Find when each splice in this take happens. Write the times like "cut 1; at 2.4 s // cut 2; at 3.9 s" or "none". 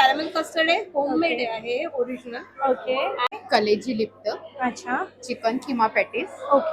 cut 1; at 3.3 s